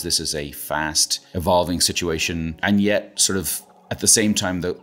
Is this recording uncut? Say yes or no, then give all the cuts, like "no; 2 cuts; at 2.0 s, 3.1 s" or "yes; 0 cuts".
no; 2 cuts; at 1.1 s, 2.5 s